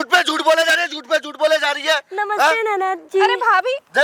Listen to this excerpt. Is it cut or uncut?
uncut